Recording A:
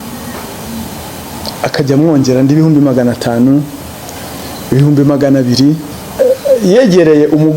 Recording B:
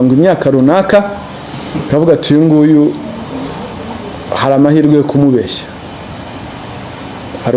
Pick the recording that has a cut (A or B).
A